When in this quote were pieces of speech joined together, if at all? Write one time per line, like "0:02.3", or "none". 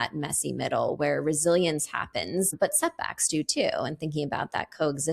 0:02.5